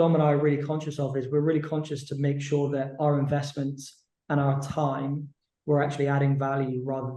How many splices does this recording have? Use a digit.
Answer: 0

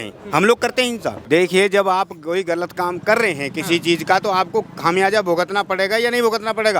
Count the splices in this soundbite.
1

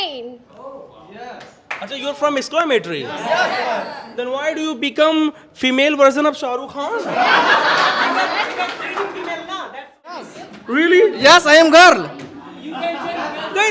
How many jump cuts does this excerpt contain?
1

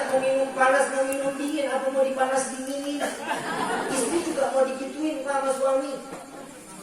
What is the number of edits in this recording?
1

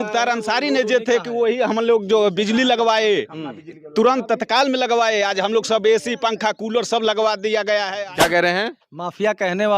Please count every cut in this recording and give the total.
1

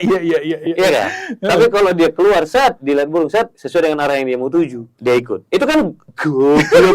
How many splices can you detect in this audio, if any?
3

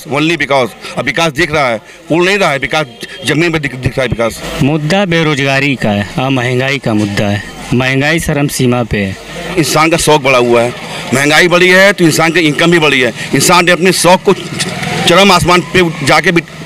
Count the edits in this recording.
2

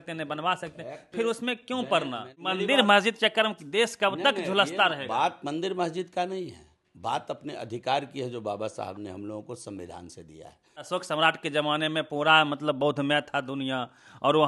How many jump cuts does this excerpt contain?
2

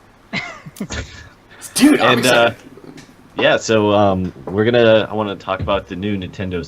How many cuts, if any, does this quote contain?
1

